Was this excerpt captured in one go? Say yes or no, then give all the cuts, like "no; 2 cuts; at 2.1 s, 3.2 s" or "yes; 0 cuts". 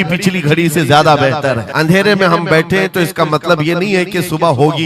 no; 1 cut; at 1.7 s